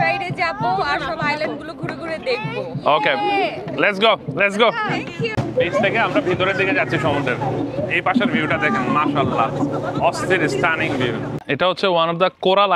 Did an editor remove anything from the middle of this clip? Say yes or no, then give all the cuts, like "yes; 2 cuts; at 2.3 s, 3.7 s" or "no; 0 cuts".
yes; 2 cuts; at 5.3 s, 11.3 s